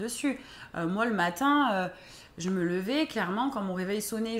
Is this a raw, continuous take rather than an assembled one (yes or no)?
yes